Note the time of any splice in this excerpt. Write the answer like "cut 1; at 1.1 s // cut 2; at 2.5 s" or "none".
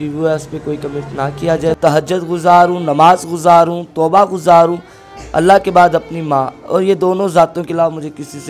cut 1; at 1.8 s